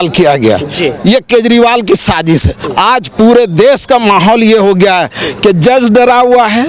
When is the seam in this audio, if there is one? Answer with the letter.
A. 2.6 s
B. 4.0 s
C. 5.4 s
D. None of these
A